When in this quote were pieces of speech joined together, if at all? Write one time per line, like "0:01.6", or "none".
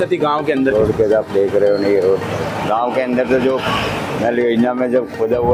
none